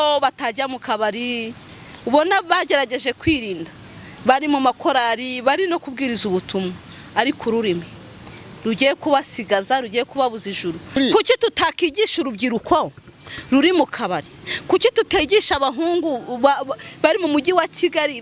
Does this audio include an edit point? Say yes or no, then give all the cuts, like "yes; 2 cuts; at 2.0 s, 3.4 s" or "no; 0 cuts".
yes; 1 cut; at 10.9 s